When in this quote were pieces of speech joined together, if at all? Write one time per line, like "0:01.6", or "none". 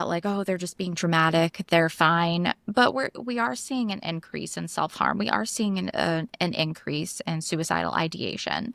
none